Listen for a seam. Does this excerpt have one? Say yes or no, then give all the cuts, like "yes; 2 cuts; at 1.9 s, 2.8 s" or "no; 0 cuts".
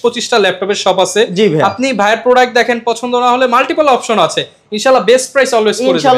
no; 0 cuts